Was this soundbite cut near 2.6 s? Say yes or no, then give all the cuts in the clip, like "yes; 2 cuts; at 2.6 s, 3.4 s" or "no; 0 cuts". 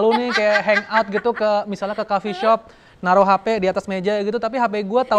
no; 0 cuts